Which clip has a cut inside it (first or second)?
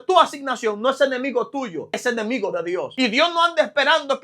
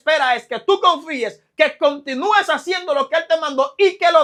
first